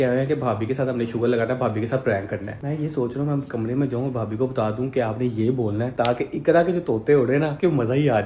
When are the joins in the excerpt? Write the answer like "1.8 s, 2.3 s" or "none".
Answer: none